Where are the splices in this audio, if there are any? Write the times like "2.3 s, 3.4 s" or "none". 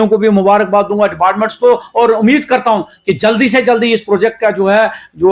none